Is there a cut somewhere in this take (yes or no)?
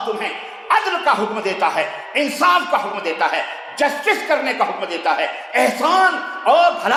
no